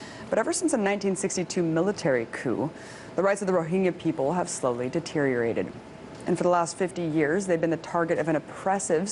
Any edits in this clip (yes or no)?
yes